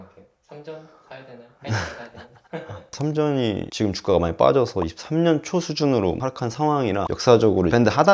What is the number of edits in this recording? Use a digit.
1